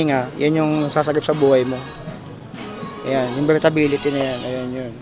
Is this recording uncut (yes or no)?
yes